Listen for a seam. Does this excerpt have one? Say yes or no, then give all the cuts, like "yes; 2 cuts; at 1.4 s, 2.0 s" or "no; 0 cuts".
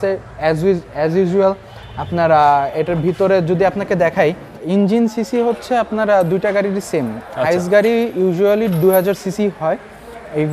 yes; 1 cut; at 4.5 s